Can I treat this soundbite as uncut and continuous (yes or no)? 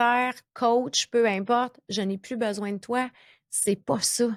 yes